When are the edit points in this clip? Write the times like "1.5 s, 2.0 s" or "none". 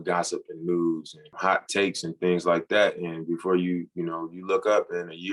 1.2 s